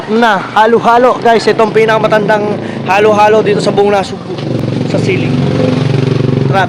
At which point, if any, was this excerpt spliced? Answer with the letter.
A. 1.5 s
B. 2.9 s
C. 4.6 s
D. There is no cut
D